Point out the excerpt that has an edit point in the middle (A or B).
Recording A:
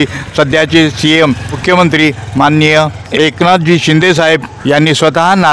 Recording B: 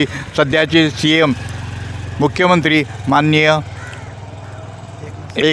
A